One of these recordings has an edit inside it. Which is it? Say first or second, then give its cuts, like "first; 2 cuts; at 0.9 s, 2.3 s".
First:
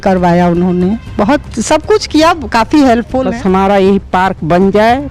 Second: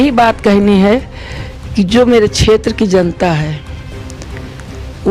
first; 1 cut; at 3.2 s